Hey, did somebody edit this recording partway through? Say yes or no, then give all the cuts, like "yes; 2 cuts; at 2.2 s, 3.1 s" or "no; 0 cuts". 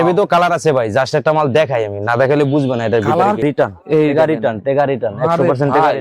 yes; 1 cut; at 3.4 s